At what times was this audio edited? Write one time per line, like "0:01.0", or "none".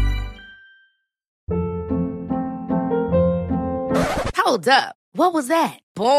0:01.3

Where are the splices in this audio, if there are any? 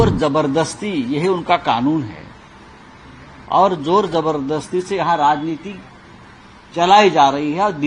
none

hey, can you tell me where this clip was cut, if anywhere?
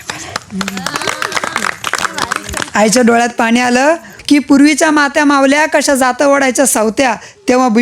0:02.0
0:04.1

